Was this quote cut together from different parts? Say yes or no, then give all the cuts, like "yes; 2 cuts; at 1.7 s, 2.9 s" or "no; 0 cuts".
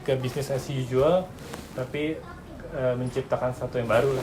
no; 0 cuts